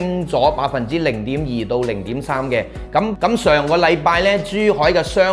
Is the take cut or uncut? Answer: cut